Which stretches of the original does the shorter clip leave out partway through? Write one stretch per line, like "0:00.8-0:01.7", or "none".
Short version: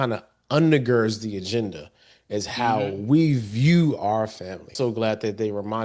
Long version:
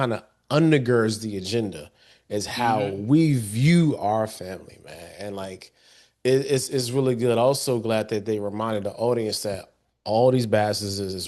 0:04.7-0:07.6